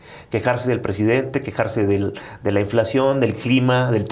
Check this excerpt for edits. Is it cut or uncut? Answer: uncut